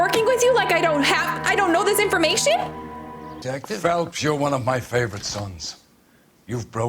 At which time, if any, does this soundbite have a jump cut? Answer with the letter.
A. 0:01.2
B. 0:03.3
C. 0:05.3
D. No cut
B